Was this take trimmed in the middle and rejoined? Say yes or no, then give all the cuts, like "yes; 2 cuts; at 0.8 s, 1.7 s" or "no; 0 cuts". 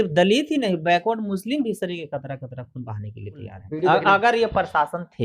yes; 1 cut; at 3.6 s